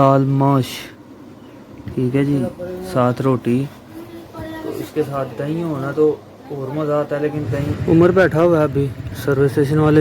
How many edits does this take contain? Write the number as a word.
one